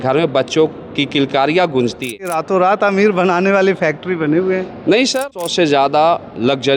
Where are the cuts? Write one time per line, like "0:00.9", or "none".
0:02.4
0:05.2